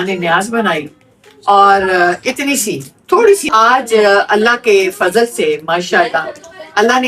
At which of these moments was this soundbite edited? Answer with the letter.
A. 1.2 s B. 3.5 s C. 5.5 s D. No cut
B